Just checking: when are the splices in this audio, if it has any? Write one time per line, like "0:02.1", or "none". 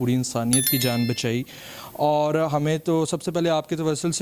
none

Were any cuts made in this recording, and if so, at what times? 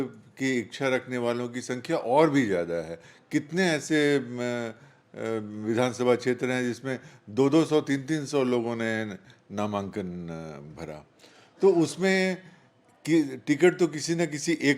none

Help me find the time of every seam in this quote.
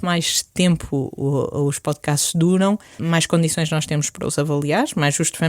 0:03.0

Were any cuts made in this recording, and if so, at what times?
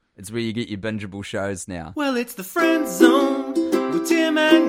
0:01.8

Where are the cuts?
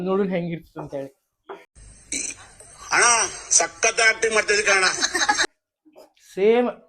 0:05.4

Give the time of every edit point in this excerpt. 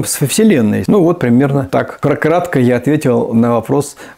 0:00.8
0:01.9

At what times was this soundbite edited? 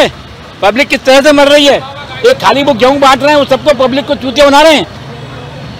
none

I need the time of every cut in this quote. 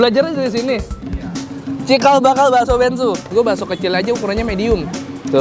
0:03.1

